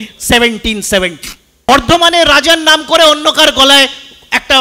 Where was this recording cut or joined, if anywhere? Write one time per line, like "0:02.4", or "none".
0:01.7